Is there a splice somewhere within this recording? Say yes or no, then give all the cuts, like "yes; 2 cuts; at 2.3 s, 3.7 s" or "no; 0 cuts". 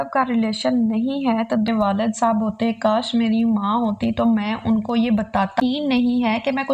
yes; 2 cuts; at 1.7 s, 5.6 s